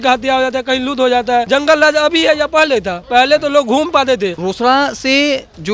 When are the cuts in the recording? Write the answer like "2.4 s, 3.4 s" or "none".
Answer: 1.5 s, 4.4 s